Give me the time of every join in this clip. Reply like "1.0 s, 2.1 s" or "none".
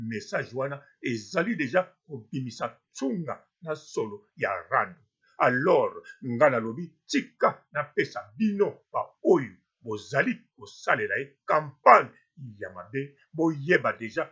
none